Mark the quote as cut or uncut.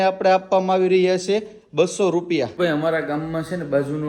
cut